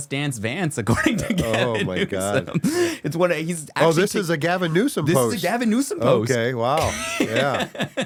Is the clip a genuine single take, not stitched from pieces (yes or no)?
yes